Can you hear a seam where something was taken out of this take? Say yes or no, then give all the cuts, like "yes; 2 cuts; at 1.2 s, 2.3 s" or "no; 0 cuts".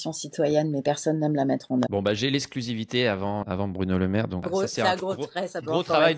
yes; 3 cuts; at 1.9 s, 3.4 s, 4.5 s